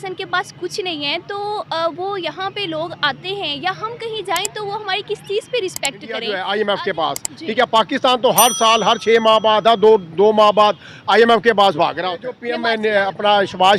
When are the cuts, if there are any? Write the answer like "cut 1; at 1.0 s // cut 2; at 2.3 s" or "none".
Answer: cut 1; at 6.2 s // cut 2; at 12.5 s